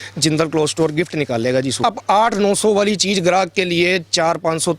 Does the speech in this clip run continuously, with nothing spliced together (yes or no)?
no